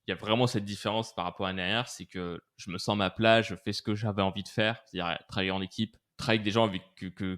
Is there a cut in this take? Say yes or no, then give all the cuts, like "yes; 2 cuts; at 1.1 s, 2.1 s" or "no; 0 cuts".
yes; 1 cut; at 6.1 s